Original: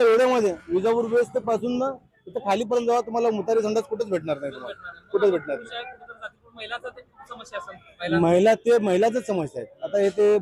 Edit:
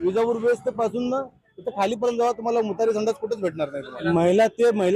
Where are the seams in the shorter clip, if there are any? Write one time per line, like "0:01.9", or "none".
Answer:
0:03.9